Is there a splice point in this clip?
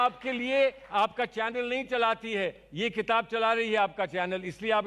no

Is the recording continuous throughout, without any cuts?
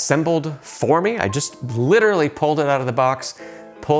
yes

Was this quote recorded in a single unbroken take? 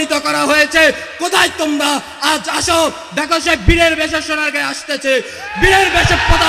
yes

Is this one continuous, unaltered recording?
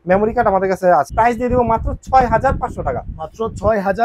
no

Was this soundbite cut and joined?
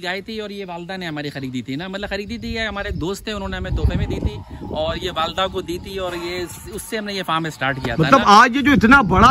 no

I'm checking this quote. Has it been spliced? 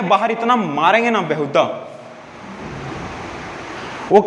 no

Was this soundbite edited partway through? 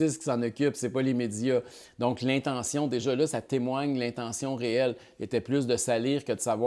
no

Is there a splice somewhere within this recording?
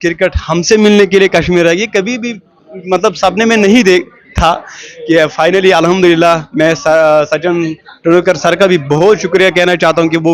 no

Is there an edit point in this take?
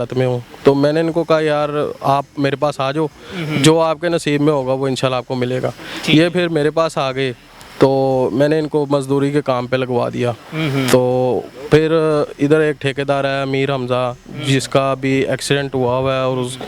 no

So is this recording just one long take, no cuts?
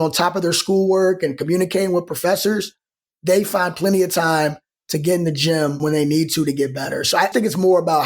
no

